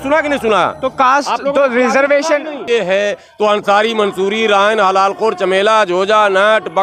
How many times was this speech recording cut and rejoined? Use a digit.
1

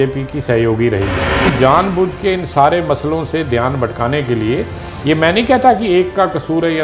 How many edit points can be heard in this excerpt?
1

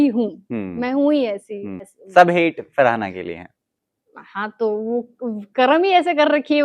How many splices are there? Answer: 1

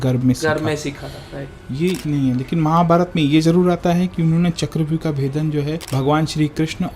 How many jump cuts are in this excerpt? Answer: 2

